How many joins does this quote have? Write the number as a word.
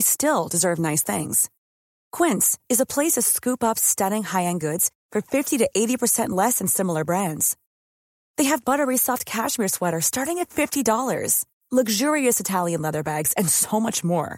zero